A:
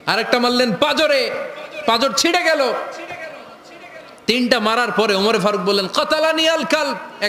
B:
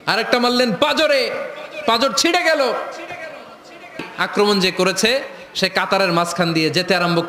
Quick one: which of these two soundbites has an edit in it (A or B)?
B